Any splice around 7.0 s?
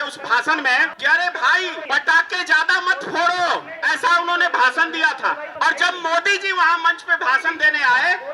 no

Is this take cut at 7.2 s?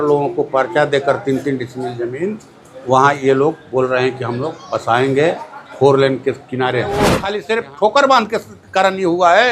yes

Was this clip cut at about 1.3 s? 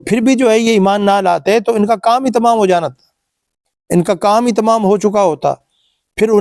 no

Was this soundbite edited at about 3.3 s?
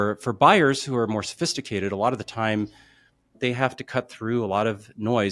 yes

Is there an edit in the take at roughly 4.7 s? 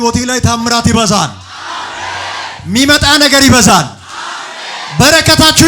no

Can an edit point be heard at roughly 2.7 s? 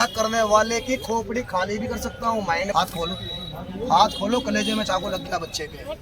yes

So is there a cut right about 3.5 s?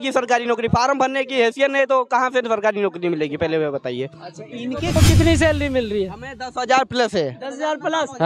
no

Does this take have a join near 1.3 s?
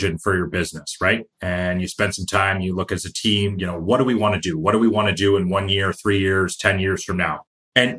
yes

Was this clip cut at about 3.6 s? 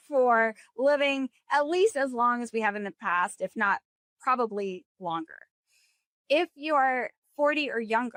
no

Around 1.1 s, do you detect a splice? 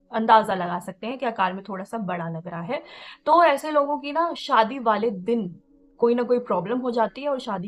no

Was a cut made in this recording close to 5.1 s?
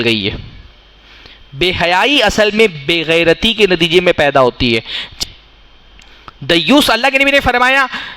yes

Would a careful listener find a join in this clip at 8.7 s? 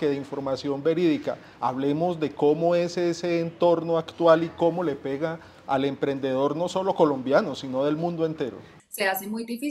yes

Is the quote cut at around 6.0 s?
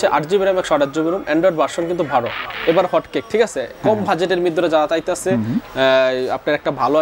no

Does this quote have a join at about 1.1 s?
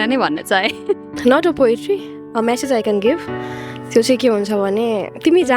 yes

